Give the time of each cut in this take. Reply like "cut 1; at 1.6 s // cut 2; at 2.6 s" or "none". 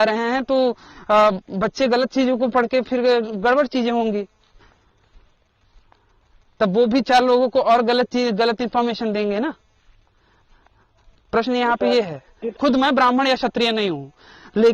cut 1; at 12.5 s